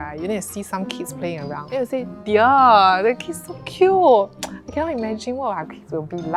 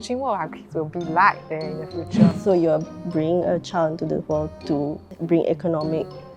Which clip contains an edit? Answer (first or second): second